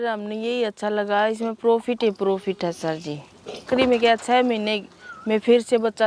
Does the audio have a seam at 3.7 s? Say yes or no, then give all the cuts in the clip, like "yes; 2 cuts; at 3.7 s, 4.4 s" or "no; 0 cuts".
yes; 1 cut; at 3.7 s